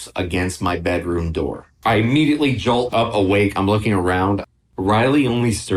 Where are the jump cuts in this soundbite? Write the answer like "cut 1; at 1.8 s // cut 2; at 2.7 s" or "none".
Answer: cut 1; at 4.5 s